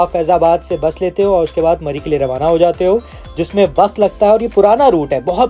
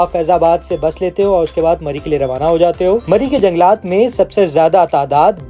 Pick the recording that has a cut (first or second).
second